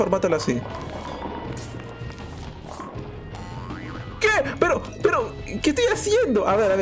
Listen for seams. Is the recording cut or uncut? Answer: uncut